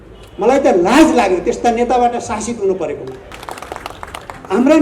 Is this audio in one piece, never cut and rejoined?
no; 1 cut; at 3.4 s

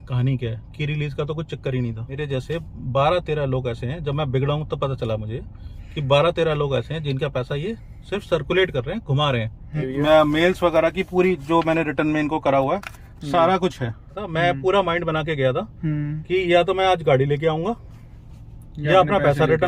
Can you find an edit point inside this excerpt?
yes; 3 cuts; at 2.2 s, 9.9 s, 14.3 s

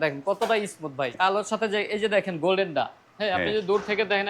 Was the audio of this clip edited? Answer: yes; 1 cut; at 1.1 s

